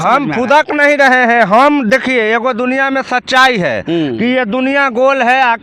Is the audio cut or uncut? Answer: uncut